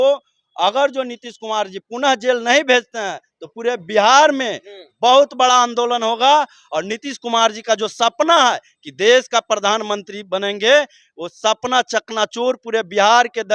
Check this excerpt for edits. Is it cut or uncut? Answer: uncut